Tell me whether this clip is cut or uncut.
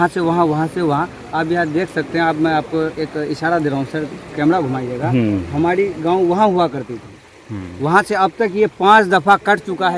uncut